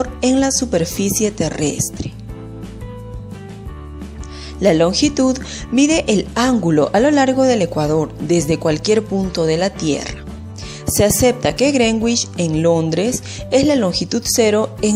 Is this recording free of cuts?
yes; 0 cuts

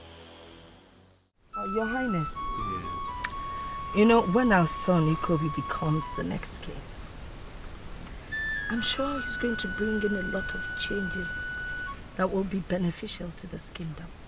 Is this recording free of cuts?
no; 1 cut; at 1.2 s

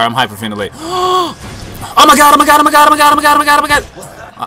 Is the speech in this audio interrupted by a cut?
no; 0 cuts

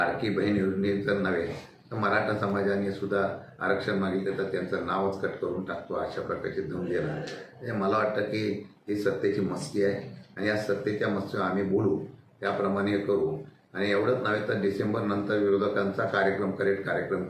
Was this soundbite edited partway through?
no; 0 cuts

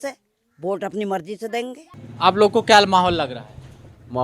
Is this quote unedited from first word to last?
no; 1 cut; at 1.9 s

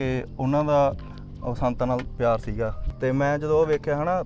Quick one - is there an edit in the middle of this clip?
yes; 1 cut; at 2.8 s

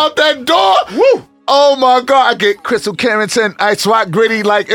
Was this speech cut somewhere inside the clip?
no; 0 cuts

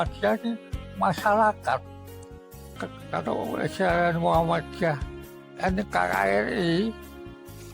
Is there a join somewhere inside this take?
yes; 1 cut; at 2.6 s

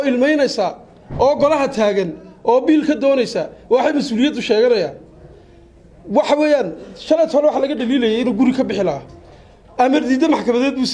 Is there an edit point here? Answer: no; 0 cuts

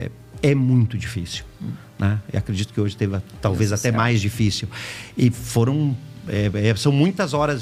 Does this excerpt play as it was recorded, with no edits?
yes; 0 cuts

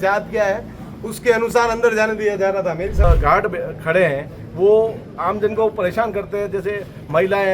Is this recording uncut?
no; 1 cut; at 3.0 s

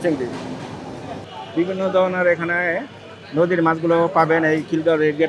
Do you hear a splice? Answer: yes; 1 cut; at 1.3 s

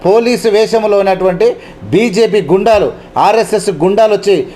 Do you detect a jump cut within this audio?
no; 0 cuts

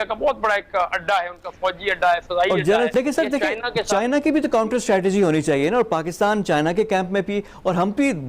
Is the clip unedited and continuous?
no; 1 cut; at 2.9 s

